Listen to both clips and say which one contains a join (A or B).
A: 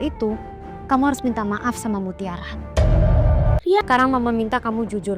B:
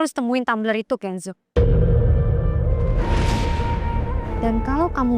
A